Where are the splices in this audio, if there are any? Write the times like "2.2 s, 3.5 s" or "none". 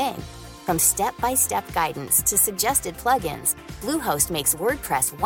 none